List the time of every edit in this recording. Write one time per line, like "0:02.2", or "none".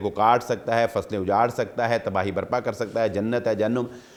none